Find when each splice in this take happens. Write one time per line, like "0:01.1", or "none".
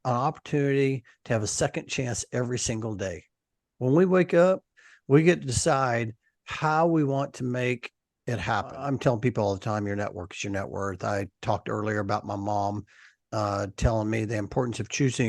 0:08.7